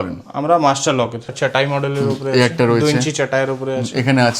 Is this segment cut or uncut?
cut